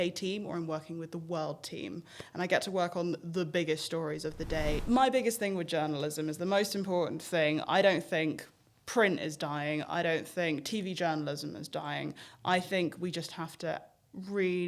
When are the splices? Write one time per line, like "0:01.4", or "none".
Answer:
0:04.8